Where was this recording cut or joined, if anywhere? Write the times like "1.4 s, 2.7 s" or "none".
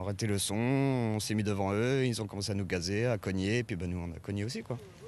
none

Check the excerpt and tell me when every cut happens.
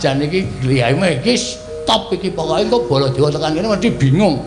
none

